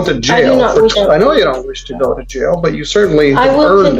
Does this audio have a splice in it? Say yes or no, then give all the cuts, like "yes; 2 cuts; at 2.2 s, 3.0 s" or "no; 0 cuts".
yes; 1 cut; at 0.9 s